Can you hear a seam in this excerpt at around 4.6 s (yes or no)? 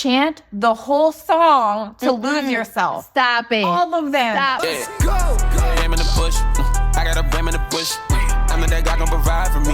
yes